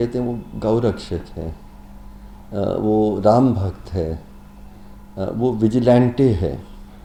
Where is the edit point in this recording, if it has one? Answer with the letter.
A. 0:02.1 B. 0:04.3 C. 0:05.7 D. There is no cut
D